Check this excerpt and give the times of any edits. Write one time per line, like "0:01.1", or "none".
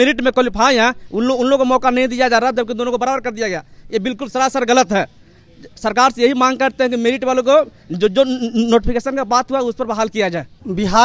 none